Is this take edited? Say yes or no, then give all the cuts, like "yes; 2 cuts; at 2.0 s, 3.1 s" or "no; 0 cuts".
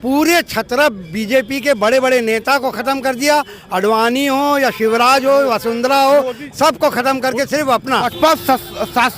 yes; 1 cut; at 8.1 s